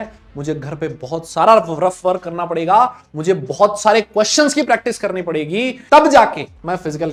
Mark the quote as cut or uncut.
uncut